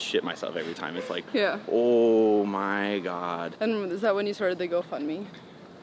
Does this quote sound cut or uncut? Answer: cut